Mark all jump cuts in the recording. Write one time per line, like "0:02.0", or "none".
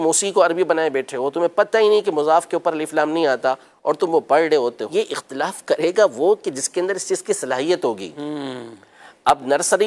0:04.8